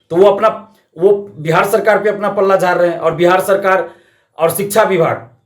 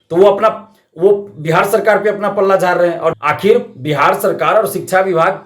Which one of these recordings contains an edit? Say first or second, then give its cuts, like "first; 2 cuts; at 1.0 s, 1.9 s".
second; 1 cut; at 3.1 s